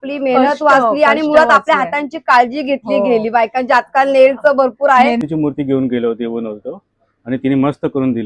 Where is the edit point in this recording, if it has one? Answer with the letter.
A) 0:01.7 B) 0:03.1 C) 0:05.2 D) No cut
C